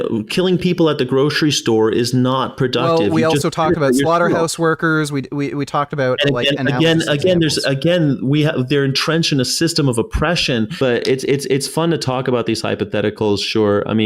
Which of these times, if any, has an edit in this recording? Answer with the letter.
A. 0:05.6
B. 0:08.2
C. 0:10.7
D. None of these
C